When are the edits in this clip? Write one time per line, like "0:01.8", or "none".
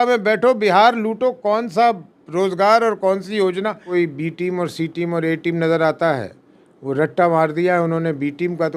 0:03.8